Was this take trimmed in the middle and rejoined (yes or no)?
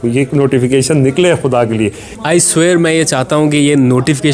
yes